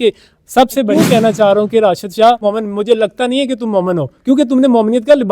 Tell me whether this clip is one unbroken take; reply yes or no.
no